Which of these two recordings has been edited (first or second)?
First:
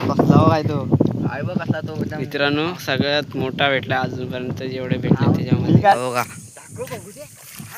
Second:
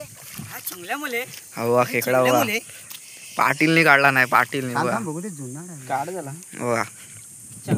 first